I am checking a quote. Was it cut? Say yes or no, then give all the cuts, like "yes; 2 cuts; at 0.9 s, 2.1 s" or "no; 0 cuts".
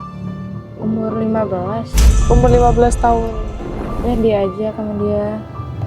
yes; 1 cut; at 3.9 s